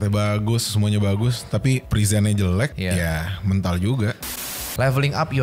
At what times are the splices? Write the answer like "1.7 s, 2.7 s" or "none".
1.9 s, 2.8 s, 4.3 s